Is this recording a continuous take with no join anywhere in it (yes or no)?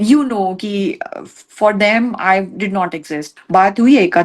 no